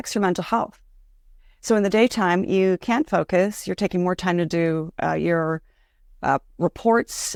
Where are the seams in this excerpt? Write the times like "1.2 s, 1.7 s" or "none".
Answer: none